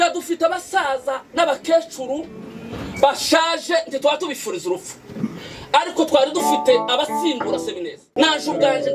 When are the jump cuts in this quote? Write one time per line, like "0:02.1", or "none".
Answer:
0:08.0